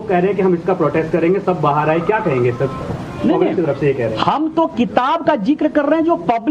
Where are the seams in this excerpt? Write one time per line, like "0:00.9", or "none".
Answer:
0:04.9

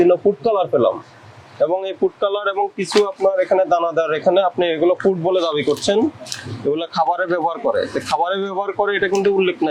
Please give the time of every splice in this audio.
none

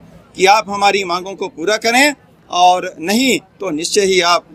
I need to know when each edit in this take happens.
none

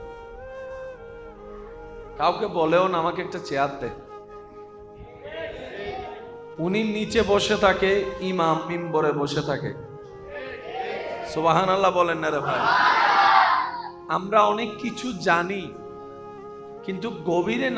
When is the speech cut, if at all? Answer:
0:04.0
0:05.2

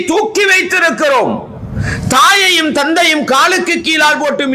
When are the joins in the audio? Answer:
none

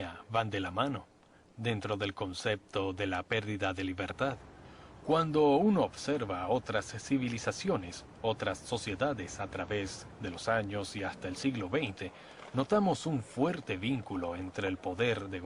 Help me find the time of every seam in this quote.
none

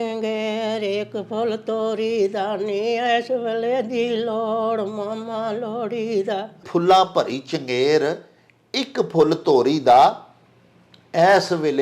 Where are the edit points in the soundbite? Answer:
0:06.6

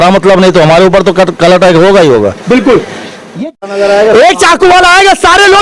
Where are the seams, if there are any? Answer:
0:03.4

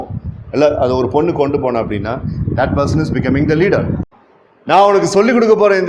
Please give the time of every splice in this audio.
0:04.0

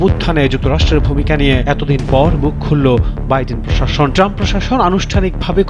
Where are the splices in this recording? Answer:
none

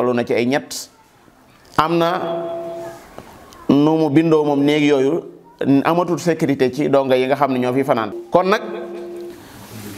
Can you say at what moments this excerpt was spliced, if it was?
0:08.1

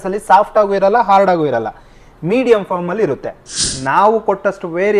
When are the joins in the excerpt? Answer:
0:03.7

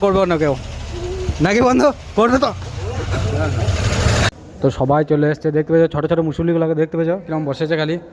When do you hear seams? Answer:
0:04.4

